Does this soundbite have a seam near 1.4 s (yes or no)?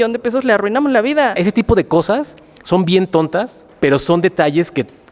yes